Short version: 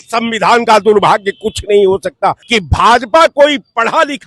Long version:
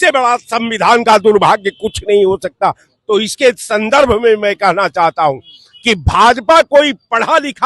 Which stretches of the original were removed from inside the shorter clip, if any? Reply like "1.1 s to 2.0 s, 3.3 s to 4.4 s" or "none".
2.8 s to 5.8 s